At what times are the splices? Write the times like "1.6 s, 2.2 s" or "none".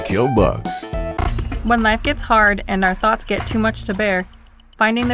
1.1 s